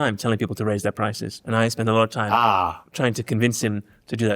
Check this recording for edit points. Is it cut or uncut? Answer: cut